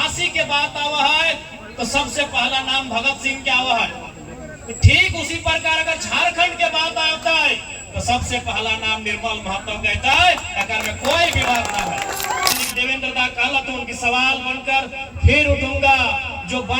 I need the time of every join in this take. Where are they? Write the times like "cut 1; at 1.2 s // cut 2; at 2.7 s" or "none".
cut 1; at 12.5 s